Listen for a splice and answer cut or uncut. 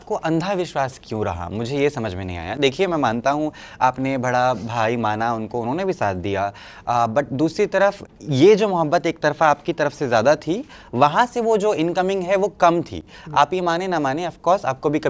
uncut